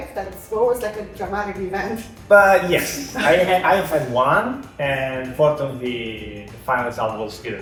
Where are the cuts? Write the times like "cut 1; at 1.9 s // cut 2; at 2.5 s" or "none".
none